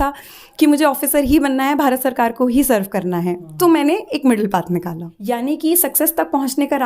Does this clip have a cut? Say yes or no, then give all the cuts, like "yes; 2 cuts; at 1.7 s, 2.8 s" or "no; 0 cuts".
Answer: yes; 1 cut; at 5.1 s